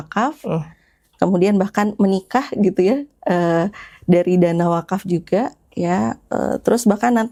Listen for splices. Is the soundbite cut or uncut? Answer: uncut